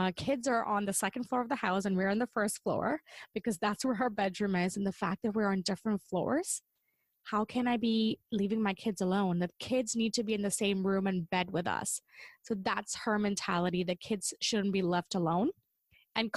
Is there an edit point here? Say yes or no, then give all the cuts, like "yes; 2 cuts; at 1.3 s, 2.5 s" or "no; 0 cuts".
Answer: no; 0 cuts